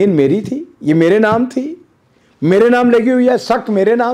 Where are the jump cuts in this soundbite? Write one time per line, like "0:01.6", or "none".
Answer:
none